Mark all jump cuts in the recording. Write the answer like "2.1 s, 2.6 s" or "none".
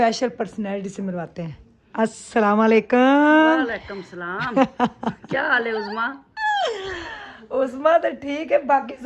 none